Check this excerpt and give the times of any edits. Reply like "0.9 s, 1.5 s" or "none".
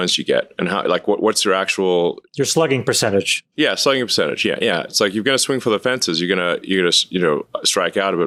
none